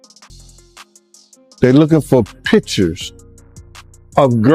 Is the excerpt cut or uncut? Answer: cut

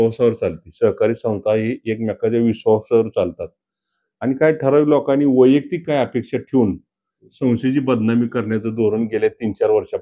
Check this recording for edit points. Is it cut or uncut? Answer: uncut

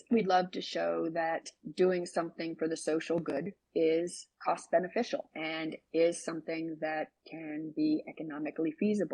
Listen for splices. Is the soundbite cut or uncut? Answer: cut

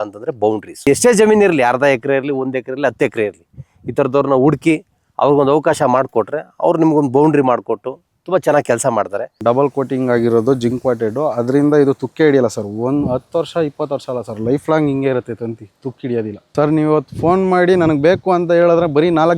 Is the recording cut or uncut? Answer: cut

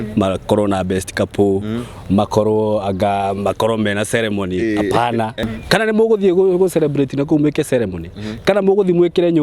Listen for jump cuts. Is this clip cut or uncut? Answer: cut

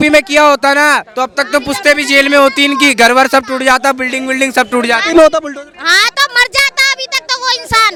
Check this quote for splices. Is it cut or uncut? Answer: uncut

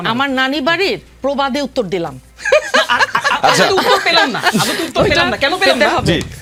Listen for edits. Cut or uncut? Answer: uncut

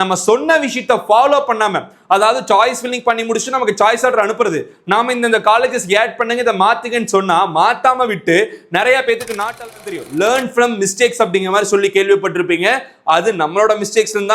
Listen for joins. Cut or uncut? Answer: cut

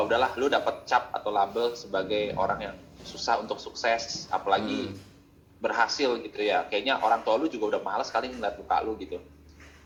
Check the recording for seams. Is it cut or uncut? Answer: uncut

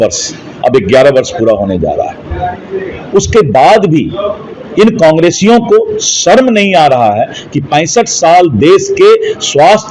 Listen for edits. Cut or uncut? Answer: uncut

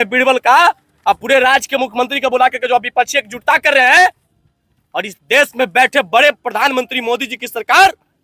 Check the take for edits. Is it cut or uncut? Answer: uncut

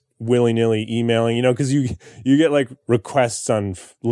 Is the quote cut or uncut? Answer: cut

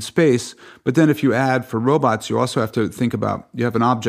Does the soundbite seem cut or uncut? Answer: uncut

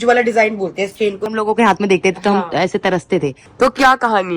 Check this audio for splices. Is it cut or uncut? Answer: cut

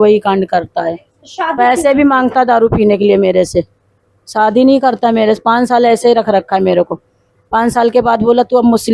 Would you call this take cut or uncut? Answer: uncut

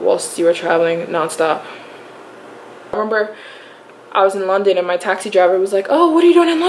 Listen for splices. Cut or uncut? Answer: cut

